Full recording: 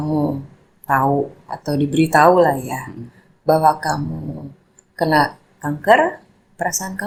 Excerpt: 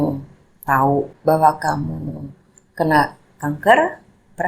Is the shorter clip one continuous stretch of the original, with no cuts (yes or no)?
no